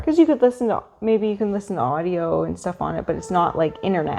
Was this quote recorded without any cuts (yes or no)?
yes